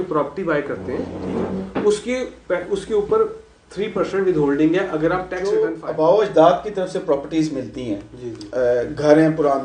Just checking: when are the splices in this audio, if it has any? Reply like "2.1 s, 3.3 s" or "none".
5.4 s